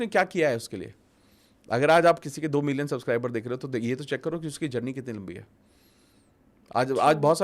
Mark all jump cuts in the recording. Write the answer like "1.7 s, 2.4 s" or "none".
none